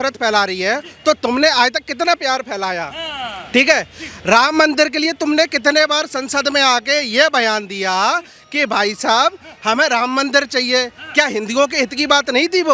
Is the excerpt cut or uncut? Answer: uncut